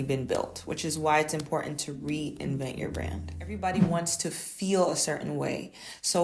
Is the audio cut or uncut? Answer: cut